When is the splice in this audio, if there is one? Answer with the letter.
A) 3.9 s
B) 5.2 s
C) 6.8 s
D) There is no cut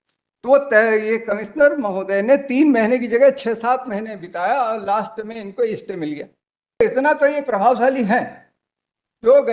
C